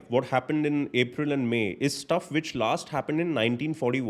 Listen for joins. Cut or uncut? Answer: uncut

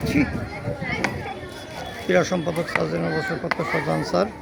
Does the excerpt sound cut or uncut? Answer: uncut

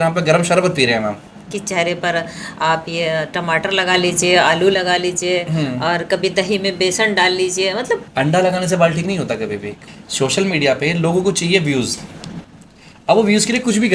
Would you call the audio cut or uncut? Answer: cut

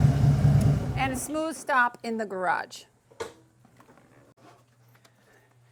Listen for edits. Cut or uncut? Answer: uncut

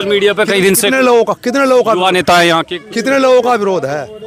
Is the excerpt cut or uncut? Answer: uncut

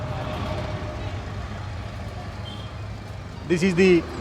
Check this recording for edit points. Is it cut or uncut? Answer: cut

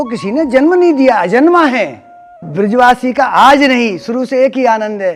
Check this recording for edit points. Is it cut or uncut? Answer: cut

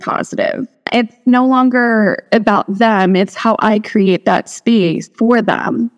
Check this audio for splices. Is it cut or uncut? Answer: cut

